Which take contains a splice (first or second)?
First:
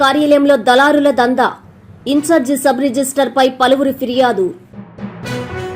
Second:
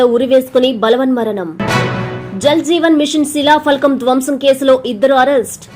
first